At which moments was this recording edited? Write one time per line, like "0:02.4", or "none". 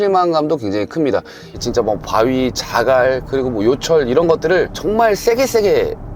0:01.6